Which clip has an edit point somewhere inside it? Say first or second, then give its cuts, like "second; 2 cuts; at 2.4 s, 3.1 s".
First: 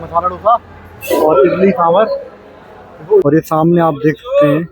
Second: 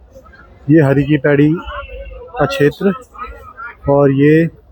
first; 1 cut; at 3.2 s